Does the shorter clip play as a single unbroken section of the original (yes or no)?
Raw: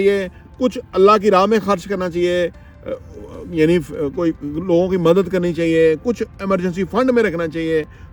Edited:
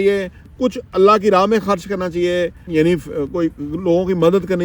no